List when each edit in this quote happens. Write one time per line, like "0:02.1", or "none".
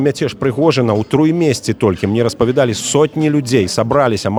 none